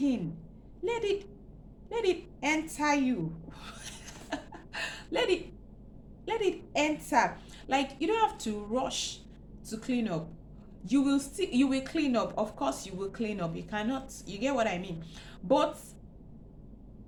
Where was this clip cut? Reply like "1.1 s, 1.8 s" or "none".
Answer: none